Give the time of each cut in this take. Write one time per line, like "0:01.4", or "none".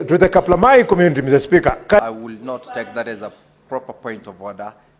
0:02.0